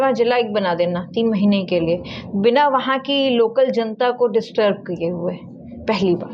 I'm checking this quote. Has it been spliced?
no; 0 cuts

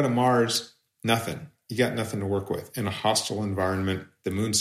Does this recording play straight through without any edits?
no; 1 cut; at 1.5 s

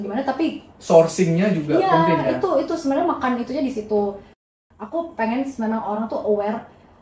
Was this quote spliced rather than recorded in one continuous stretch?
yes; 1 cut; at 4.5 s

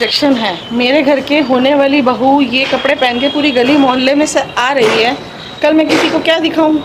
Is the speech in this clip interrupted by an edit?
no; 0 cuts

